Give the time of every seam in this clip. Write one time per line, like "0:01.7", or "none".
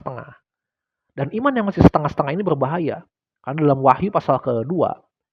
none